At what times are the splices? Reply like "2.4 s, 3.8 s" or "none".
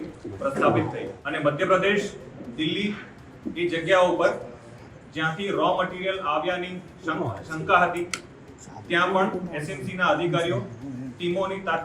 1.2 s